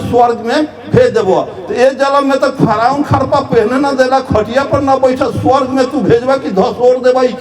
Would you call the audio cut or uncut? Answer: uncut